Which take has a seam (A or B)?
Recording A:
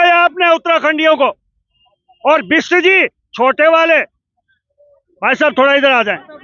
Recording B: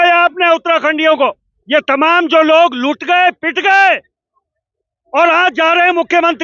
B